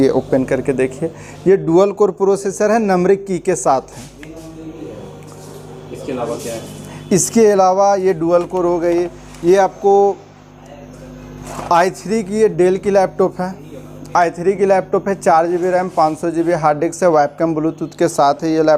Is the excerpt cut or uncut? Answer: uncut